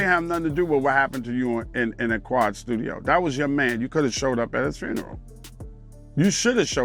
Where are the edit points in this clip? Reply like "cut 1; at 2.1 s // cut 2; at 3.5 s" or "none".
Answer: none

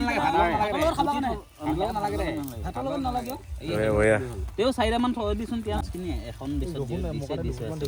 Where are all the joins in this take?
none

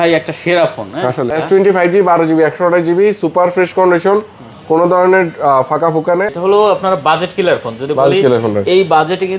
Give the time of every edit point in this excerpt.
cut 1; at 1.3 s // cut 2; at 6.3 s

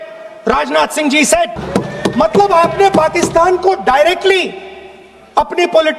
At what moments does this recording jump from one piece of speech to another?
cut 1; at 1.5 s

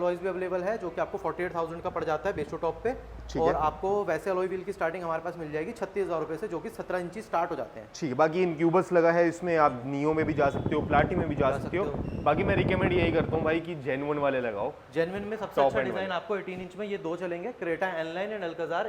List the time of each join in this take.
none

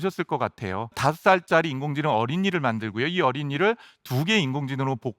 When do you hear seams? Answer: cut 1; at 1.0 s

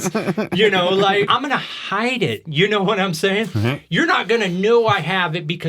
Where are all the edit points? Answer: cut 1; at 1.3 s

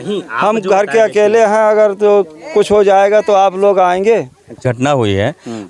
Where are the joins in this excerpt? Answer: cut 1; at 4.6 s

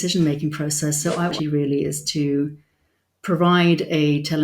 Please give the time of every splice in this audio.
cut 1; at 1.3 s

